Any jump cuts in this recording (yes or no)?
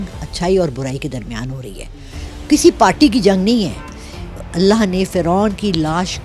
yes